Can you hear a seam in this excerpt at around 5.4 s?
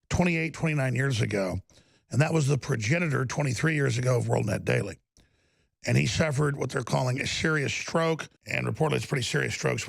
no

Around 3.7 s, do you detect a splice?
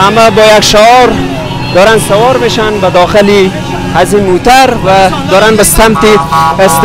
no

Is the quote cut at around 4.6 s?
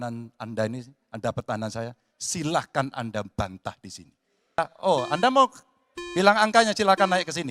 yes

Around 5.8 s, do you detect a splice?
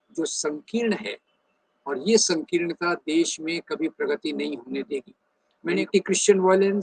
yes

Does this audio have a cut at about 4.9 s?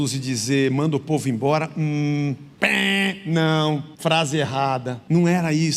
yes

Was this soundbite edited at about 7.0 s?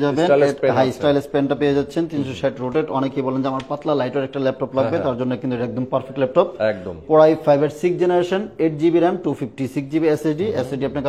no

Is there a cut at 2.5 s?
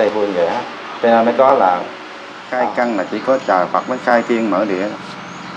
yes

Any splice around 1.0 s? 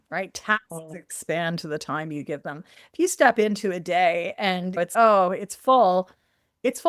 no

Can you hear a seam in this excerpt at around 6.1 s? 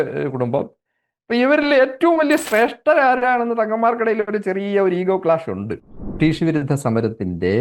yes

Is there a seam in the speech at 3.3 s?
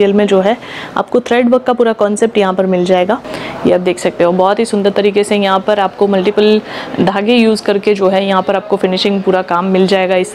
yes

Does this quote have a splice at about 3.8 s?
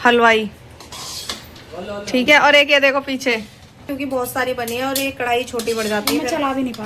yes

